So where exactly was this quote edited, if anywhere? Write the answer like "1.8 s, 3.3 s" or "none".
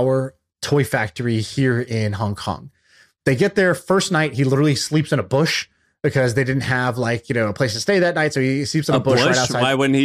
none

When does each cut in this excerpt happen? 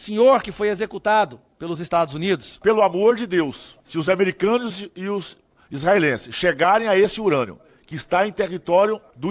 2.6 s

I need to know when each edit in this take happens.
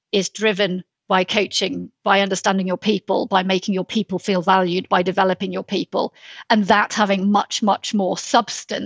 0.9 s

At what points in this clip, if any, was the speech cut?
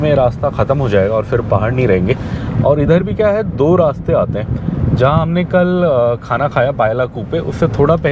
none

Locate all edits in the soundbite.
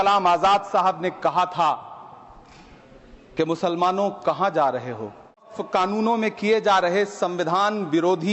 5.6 s

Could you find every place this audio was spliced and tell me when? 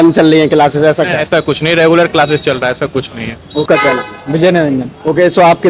none

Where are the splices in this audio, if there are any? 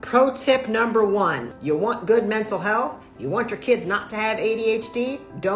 1.5 s

